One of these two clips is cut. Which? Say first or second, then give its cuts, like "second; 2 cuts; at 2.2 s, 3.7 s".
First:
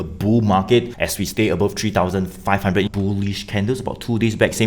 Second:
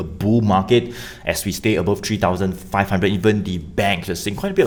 first; 2 cuts; at 1.0 s, 2.9 s